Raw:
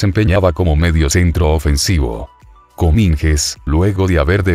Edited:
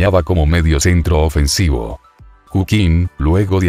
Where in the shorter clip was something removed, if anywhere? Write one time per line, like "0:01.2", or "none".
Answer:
0:02.6